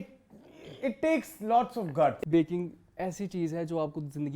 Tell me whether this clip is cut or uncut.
cut